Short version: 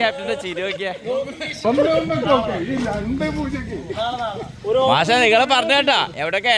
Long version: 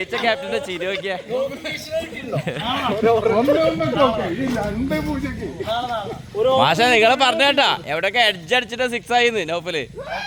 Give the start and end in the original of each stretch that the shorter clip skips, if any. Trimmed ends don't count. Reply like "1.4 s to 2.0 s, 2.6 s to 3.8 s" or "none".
1.9 s to 3.3 s